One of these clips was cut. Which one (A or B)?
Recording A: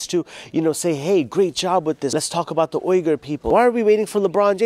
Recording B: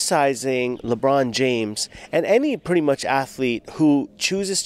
A